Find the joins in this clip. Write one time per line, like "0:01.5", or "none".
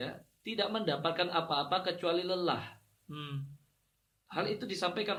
none